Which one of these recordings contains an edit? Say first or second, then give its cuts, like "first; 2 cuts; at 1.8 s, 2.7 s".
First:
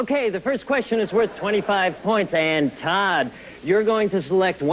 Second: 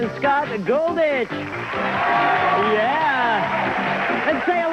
second; 1 cut; at 2.0 s